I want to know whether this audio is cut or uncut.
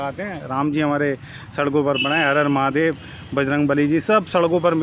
uncut